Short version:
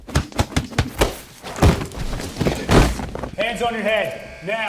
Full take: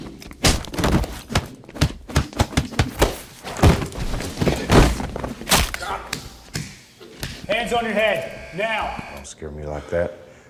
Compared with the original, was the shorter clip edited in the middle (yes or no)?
yes